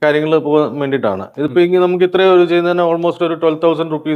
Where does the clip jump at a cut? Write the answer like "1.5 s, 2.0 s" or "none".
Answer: none